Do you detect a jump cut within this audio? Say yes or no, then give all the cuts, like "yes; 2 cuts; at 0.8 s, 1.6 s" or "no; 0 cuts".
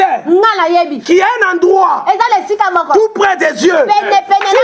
no; 0 cuts